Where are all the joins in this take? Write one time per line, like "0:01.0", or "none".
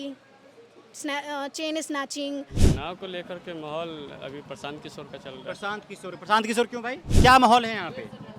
0:02.6
0:07.1